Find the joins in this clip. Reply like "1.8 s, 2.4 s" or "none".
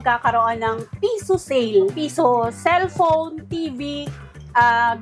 2.0 s